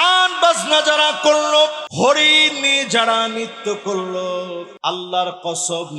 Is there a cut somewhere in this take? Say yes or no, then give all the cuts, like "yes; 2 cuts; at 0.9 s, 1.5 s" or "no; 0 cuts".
yes; 2 cuts; at 1.8 s, 4.7 s